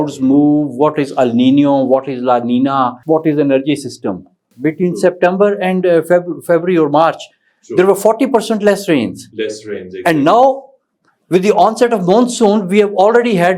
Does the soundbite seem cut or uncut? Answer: cut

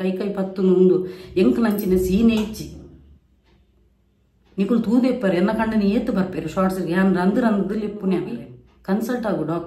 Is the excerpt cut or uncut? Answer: cut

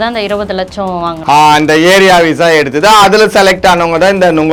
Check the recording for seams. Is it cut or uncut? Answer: uncut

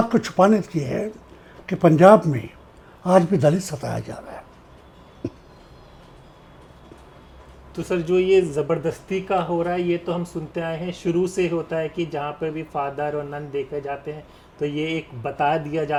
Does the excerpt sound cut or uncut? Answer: uncut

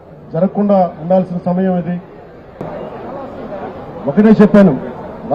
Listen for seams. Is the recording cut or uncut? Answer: cut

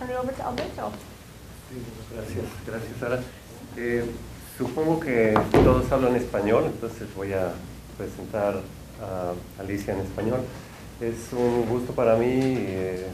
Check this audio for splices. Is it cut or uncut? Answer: uncut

